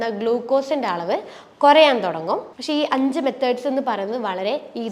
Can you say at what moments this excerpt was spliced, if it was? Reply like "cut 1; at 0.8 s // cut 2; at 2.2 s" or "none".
cut 1; at 2.5 s